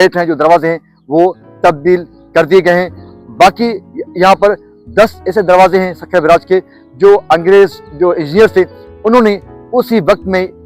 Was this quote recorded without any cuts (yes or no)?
yes